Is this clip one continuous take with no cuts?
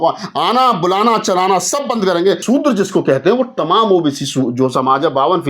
no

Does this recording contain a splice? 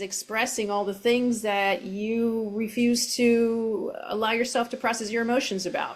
no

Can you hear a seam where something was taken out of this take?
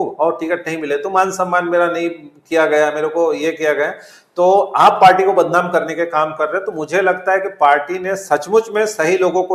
no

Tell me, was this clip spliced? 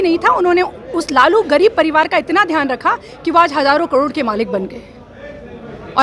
no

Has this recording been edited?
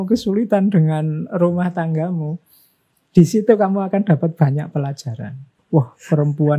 yes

